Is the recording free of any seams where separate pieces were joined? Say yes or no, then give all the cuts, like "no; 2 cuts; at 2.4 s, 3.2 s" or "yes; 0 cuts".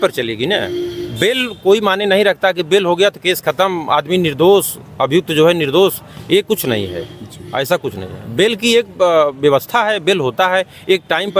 yes; 0 cuts